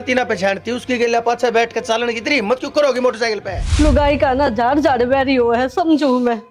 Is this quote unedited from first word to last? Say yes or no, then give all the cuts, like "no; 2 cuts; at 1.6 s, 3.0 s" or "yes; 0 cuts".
no; 1 cut; at 3.5 s